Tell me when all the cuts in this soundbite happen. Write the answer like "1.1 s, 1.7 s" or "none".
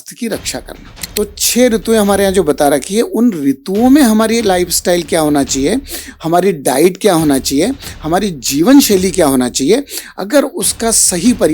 1.0 s